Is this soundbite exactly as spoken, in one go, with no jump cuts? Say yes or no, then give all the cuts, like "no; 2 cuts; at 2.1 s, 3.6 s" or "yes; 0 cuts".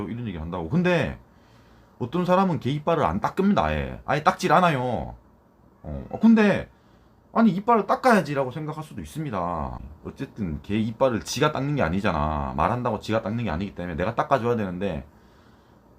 no; 1 cut; at 9.8 s